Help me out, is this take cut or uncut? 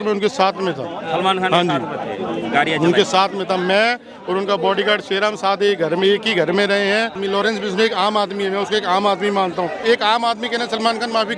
cut